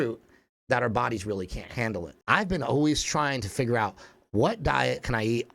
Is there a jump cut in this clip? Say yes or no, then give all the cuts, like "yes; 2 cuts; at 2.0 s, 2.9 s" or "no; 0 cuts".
yes; 1 cut; at 2.1 s